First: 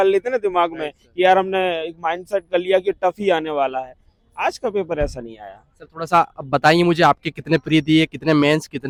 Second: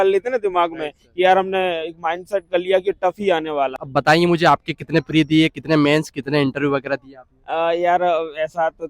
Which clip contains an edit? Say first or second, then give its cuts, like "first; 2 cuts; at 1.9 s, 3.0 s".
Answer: second; 1 cut; at 3.8 s